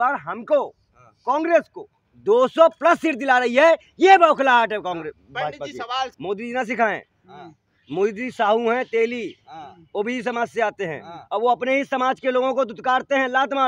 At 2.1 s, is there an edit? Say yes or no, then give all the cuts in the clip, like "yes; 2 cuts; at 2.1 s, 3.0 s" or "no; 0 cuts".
no; 1 cut; at 6.2 s